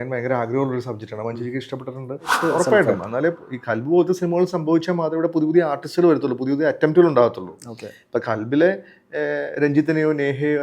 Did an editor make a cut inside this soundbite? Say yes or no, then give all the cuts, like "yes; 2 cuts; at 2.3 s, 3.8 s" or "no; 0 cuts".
yes; 1 cut; at 2.4 s